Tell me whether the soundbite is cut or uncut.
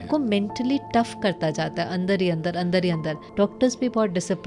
cut